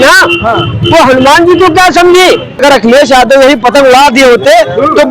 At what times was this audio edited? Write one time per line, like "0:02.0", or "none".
0:02.8